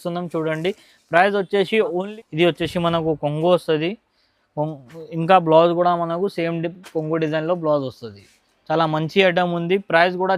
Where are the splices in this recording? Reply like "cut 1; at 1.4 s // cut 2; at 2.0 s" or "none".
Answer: cut 1; at 2.0 s